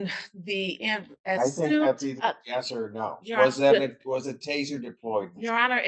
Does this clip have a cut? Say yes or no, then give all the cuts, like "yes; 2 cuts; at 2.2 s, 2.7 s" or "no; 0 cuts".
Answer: no; 0 cuts